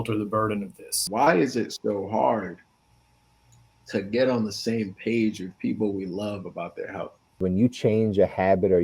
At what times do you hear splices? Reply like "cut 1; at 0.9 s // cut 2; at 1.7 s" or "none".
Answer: cut 1; at 1.0 s // cut 2; at 7.3 s